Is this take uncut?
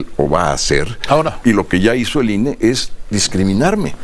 yes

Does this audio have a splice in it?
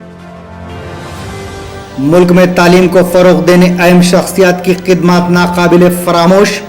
yes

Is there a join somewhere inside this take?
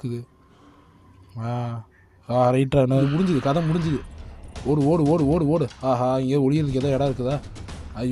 yes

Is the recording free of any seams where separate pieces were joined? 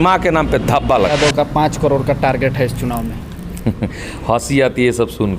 no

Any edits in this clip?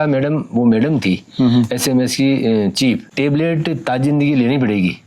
yes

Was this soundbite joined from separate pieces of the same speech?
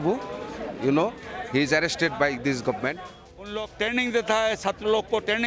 yes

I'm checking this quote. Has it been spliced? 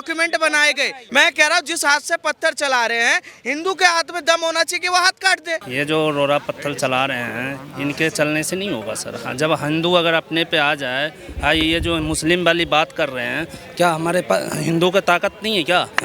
yes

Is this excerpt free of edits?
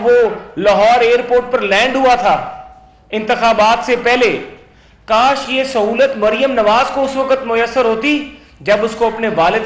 yes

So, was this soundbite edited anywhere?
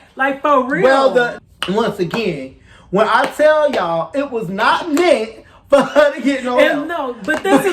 yes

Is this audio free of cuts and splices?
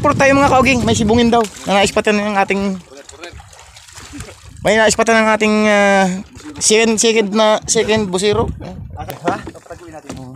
no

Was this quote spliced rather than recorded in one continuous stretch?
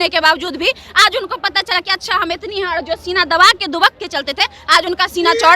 no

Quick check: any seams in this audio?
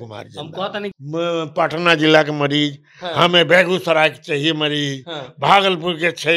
yes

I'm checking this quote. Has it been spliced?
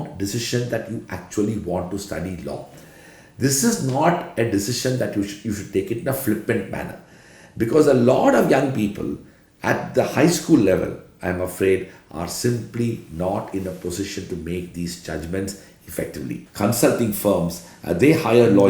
yes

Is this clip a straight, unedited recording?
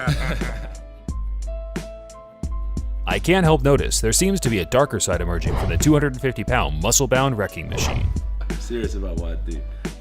yes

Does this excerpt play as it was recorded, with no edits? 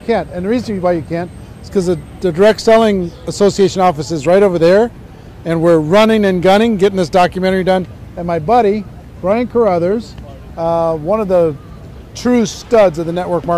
no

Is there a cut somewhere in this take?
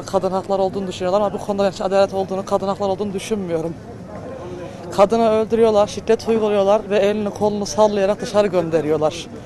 no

